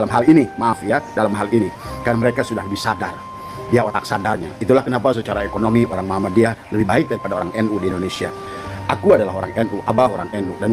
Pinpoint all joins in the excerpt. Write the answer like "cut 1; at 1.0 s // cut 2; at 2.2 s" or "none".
none